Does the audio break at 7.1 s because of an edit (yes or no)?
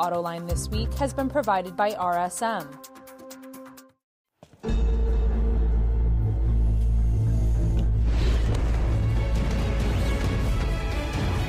no